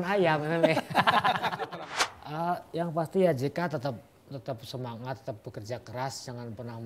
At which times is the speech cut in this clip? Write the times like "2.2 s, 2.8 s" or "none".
1.7 s